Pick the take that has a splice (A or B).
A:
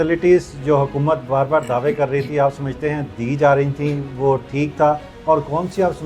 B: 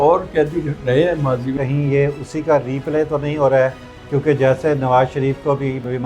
B